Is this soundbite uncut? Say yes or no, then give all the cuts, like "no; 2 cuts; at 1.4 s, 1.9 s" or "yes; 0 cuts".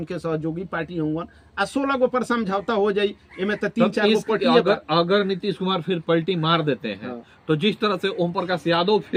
yes; 0 cuts